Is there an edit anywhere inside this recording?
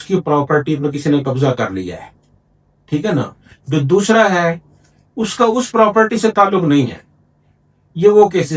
no; 0 cuts

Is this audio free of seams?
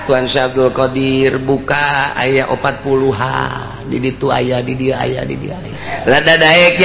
no; 1 cut; at 5.8 s

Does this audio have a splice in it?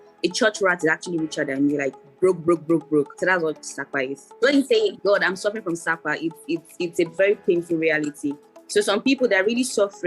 yes; 2 cuts; at 3.7 s, 8.5 s

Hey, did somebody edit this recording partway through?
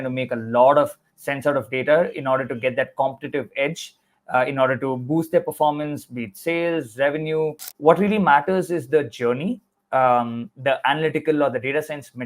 yes; 1 cut; at 7.7 s

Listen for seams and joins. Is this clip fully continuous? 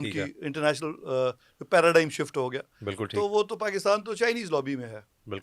yes; 0 cuts

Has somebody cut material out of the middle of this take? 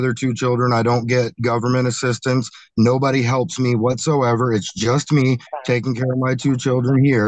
no; 0 cuts

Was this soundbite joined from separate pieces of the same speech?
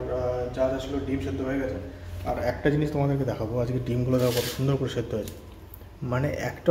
no; 0 cuts

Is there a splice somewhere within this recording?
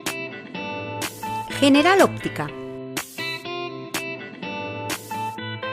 yes; 1 cut; at 0.9 s

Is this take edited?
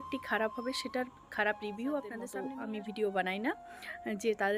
yes; 1 cut; at 2.3 s

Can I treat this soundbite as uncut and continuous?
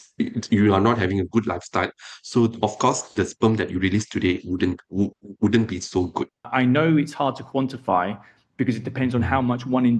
no; 1 cut; at 6.5 s

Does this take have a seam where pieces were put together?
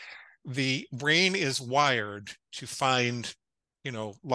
no; 0 cuts

